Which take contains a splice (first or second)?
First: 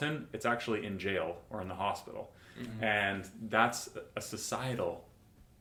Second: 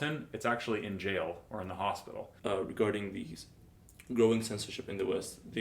second